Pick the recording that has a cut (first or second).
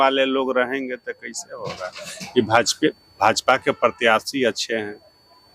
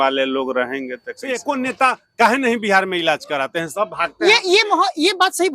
second